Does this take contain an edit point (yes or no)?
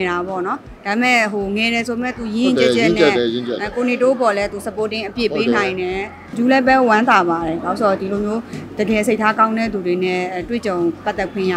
yes